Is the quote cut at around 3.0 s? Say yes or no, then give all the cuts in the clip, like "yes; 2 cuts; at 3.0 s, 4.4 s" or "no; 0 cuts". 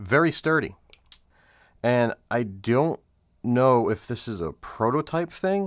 no; 1 cut; at 1.2 s